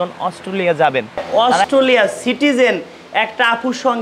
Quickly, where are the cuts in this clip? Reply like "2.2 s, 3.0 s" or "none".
1.2 s

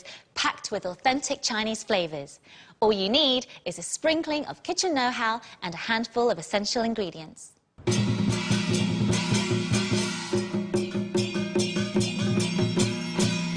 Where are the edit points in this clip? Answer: 12.2 s

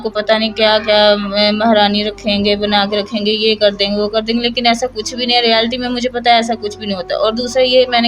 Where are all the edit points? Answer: none

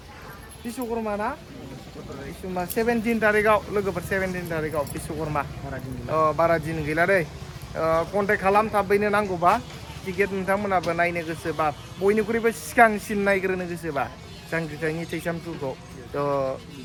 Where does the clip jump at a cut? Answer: none

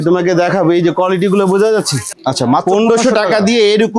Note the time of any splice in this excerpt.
2.1 s

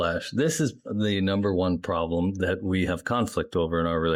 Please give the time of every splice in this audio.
none

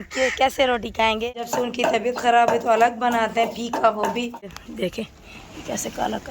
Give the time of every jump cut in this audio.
1.4 s, 4.6 s

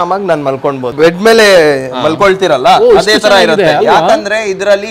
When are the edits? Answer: 0.9 s

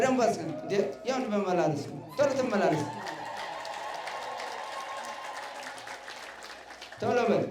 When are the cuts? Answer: none

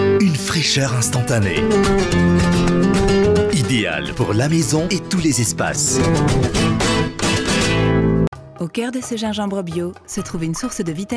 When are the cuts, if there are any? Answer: none

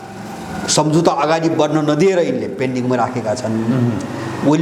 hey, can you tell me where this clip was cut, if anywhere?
none

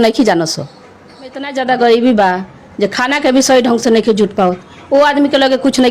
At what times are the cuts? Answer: 1.5 s

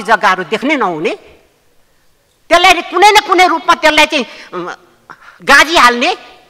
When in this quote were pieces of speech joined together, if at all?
none

